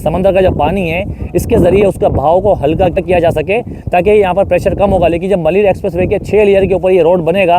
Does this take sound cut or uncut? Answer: cut